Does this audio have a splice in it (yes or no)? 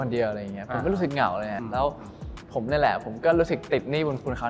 yes